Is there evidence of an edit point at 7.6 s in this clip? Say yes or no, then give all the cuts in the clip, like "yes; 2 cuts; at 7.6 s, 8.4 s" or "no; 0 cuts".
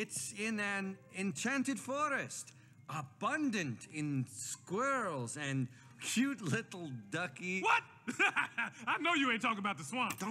yes; 1 cut; at 7.6 s